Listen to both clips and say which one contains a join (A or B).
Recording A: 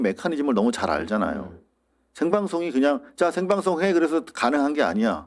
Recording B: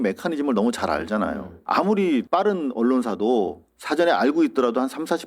B